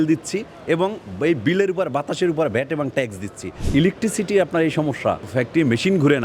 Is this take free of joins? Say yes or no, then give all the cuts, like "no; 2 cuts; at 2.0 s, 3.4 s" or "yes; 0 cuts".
no; 2 cuts; at 3.6 s, 5.2 s